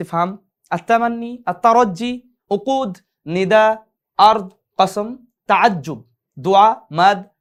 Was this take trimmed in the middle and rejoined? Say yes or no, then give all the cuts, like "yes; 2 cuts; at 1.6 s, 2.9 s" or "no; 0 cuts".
no; 0 cuts